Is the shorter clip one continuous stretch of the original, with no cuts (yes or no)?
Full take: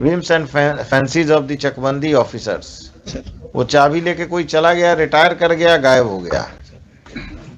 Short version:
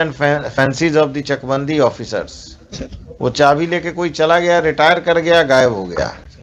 yes